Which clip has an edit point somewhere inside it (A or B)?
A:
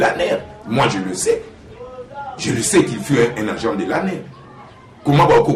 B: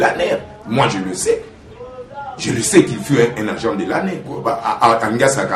B